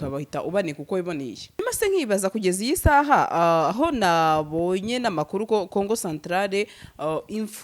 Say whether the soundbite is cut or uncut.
cut